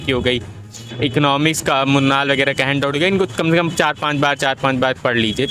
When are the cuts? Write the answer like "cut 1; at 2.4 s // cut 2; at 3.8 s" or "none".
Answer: none

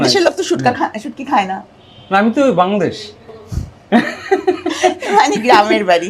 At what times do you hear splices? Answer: none

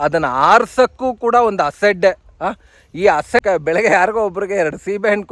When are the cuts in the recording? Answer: cut 1; at 3.4 s

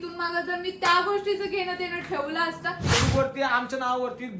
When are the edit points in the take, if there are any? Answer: cut 1; at 2.9 s

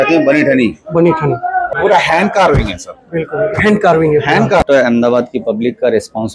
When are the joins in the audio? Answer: cut 1; at 1.7 s // cut 2; at 4.6 s

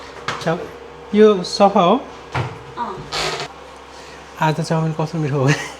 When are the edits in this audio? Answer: cut 1; at 3.5 s

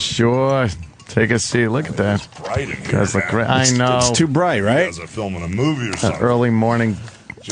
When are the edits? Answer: none

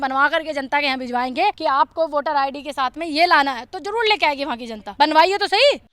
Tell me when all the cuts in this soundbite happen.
cut 1; at 1.6 s // cut 2; at 4.8 s

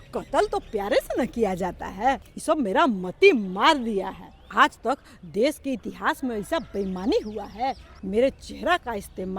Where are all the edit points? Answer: cut 1; at 2.3 s // cut 2; at 4.5 s // cut 3; at 7.9 s

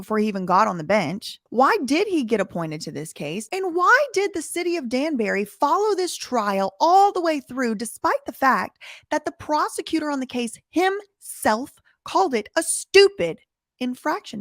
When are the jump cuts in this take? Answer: cut 1; at 1.3 s

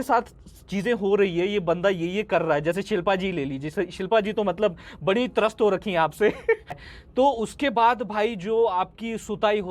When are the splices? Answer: cut 1; at 6.8 s

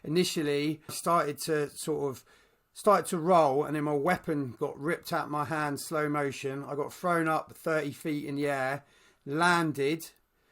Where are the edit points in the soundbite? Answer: cut 1; at 1.0 s

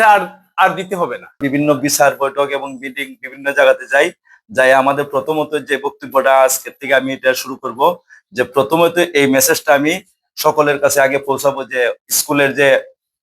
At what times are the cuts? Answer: cut 1; at 1.4 s

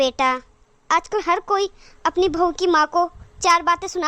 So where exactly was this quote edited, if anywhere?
none

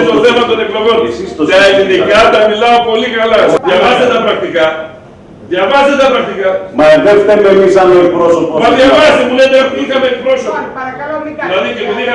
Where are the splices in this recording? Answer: cut 1; at 3.6 s

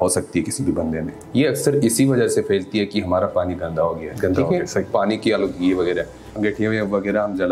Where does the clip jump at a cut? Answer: cut 1; at 1.1 s // cut 2; at 6.3 s

